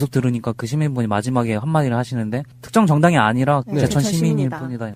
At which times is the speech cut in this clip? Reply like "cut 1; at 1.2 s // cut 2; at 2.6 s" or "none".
cut 1; at 1.1 s